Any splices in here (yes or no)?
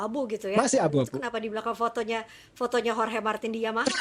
no